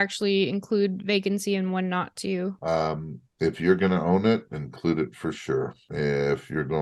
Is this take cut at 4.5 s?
no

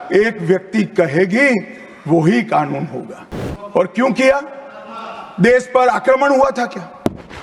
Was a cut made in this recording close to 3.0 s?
no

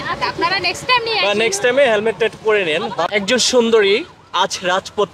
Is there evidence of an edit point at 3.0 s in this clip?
yes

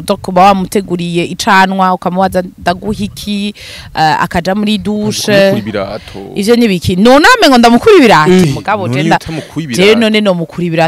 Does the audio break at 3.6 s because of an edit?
no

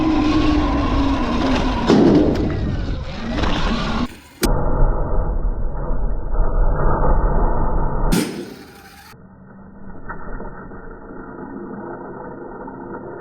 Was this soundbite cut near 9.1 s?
no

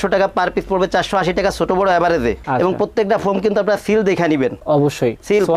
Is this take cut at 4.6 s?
no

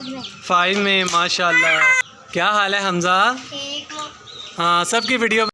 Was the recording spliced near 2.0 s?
yes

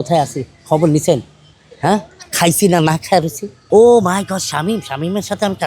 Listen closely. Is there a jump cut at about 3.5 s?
yes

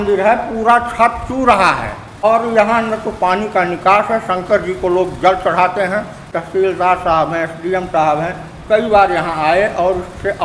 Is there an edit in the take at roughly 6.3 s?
yes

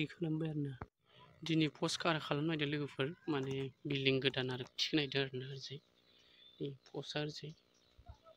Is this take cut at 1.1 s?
yes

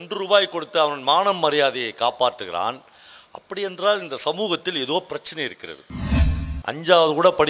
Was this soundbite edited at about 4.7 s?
no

